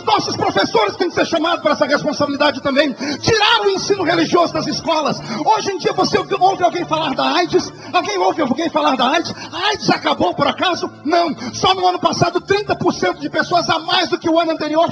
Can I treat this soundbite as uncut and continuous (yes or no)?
yes